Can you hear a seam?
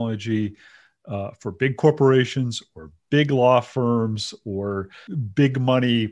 yes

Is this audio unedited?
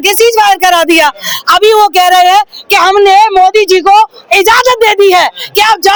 yes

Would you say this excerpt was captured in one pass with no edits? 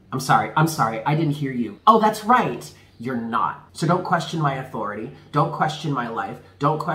no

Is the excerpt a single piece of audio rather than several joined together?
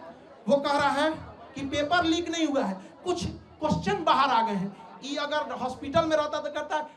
yes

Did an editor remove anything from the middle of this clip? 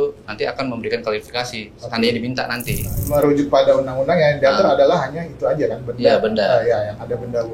yes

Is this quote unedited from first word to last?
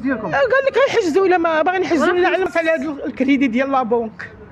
no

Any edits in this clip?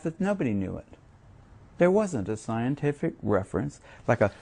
yes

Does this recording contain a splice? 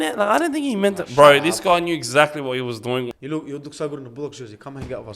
yes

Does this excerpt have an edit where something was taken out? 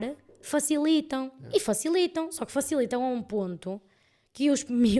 no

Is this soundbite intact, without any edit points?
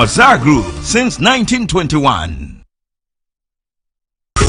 yes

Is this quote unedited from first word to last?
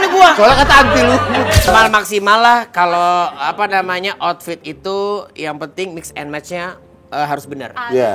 no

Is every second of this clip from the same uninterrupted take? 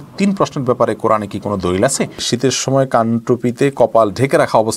no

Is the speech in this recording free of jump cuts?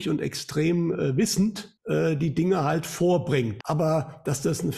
no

